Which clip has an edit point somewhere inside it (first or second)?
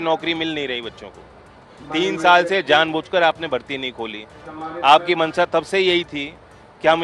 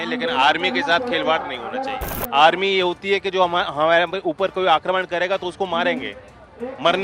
second